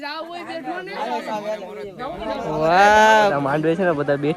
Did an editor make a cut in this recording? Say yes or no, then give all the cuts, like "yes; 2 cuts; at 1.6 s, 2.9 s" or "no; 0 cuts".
yes; 1 cut; at 3.3 s